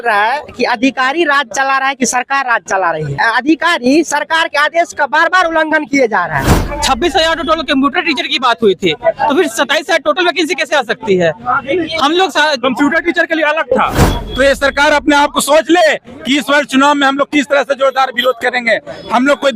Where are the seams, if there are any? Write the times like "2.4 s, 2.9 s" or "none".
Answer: 3.1 s, 6.6 s, 14.0 s